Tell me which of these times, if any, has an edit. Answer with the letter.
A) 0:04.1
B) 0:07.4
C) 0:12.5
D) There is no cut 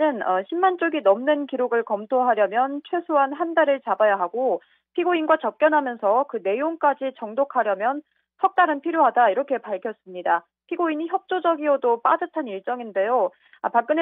A